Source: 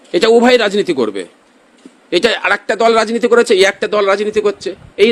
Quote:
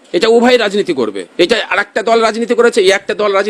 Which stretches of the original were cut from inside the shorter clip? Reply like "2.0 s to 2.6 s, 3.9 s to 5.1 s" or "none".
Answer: 1.2 s to 2.0 s